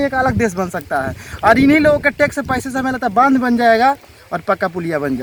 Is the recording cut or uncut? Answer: uncut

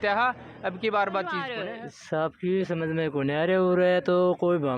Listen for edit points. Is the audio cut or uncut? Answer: cut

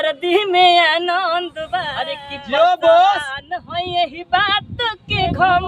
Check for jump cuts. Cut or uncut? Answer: cut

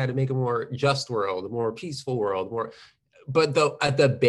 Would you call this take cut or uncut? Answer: uncut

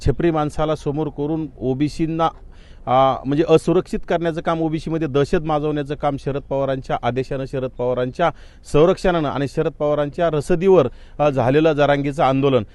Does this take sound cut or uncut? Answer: uncut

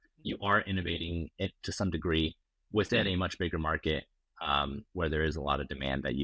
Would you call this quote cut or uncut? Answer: uncut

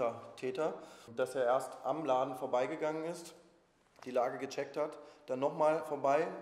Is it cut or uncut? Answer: cut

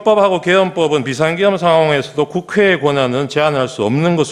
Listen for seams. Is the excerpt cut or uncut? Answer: uncut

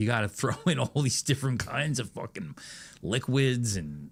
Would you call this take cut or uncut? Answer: uncut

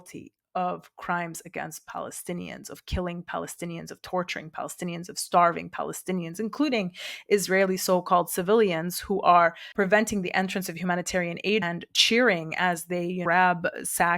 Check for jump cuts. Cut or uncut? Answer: cut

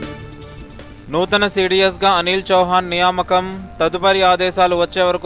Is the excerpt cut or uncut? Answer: cut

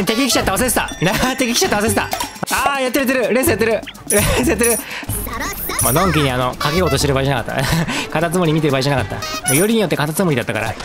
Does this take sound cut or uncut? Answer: cut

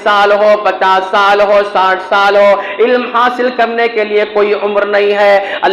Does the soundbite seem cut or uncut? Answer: uncut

